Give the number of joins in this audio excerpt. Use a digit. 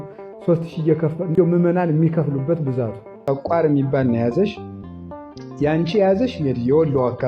1